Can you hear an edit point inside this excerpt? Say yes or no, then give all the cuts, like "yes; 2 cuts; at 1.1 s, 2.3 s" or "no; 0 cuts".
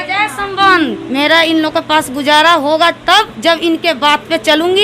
yes; 1 cut; at 1.0 s